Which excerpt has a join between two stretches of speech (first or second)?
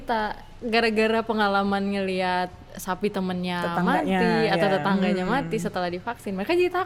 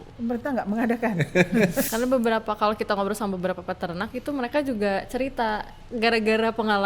second